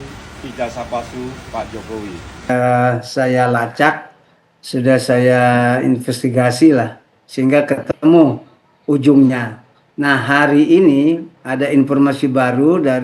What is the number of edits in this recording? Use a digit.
1